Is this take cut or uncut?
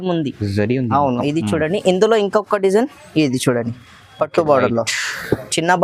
uncut